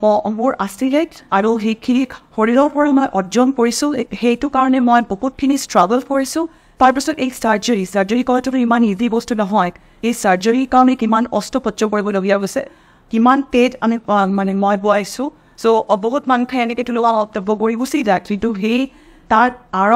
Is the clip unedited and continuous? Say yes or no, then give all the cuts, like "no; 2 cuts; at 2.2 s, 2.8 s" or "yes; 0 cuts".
yes; 0 cuts